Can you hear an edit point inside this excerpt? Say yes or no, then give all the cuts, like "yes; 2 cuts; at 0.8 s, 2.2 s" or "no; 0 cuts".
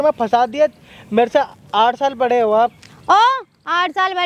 no; 0 cuts